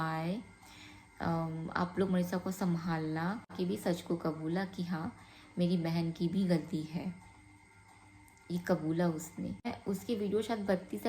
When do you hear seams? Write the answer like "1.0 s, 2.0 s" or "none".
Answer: 3.5 s, 9.7 s